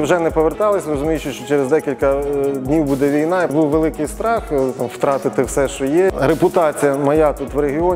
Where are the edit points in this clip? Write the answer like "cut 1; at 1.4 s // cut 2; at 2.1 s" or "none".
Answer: cut 1; at 3.5 s

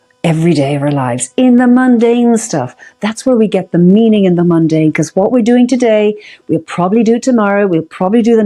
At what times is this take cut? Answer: none

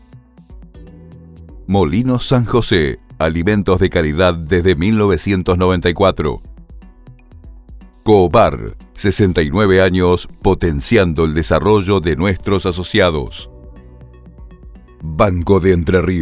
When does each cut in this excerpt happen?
cut 1; at 6.4 s // cut 2; at 8.0 s

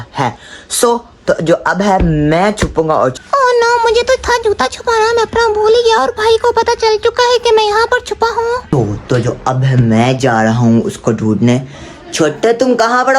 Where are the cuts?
cut 1; at 3.2 s // cut 2; at 8.6 s

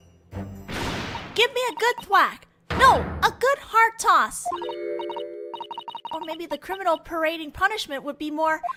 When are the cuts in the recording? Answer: none

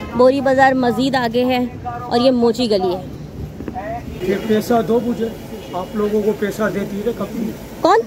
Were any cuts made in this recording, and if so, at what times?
cut 1; at 4.2 s

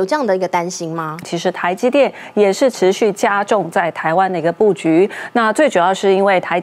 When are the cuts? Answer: cut 1; at 1.3 s

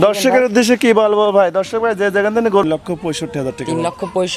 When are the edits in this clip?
cut 1; at 2.6 s

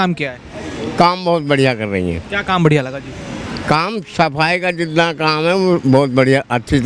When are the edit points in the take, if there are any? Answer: none

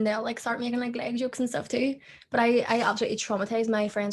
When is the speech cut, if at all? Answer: none

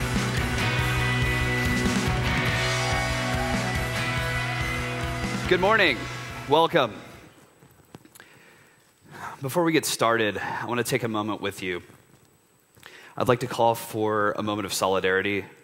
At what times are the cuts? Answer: none

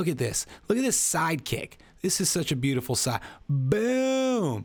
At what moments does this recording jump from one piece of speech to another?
none

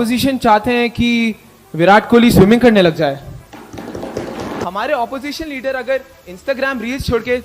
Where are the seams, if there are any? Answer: cut 1; at 4.6 s

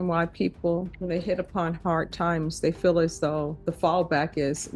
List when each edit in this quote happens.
cut 1; at 0.9 s // cut 2; at 3.6 s

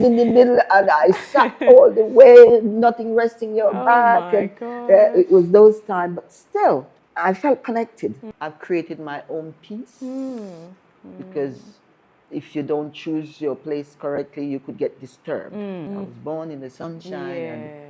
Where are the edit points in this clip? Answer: cut 1; at 8.2 s // cut 2; at 15.9 s

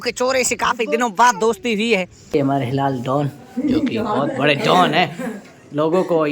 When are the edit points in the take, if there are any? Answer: cut 1; at 2.3 s

